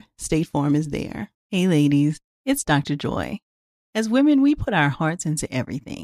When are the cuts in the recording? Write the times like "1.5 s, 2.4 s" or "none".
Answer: 1.3 s